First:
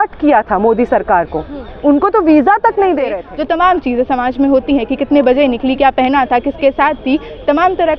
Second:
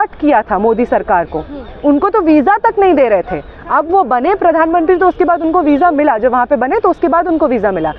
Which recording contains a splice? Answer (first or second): first